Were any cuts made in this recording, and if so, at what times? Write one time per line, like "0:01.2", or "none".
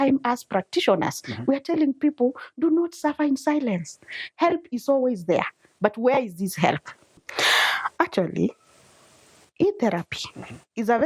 0:07.3

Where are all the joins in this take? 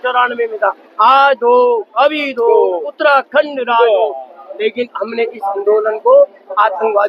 none

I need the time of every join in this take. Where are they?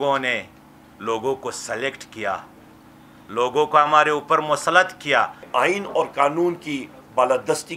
0:05.4

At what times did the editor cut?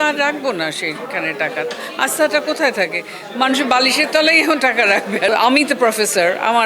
0:05.3

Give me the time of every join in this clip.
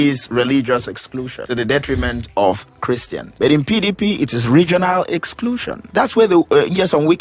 0:01.4
0:03.2
0:05.8

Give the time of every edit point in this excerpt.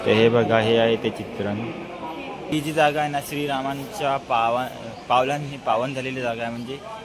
none

